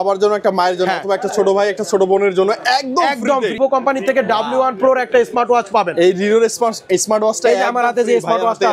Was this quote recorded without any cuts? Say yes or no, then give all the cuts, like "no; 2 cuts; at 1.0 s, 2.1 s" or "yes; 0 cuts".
no; 1 cut; at 3.6 s